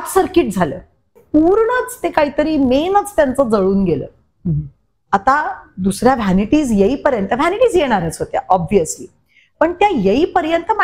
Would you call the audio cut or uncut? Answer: cut